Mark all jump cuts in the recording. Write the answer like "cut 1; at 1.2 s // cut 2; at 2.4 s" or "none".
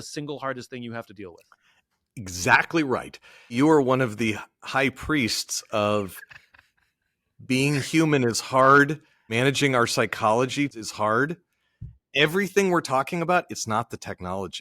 cut 1; at 3.5 s // cut 2; at 9.3 s // cut 3; at 10.7 s